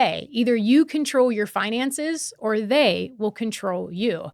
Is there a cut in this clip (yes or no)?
no